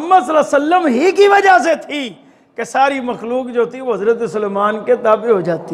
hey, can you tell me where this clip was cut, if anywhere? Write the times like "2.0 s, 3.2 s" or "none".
none